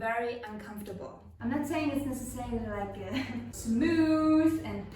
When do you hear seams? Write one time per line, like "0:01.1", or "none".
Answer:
0:01.2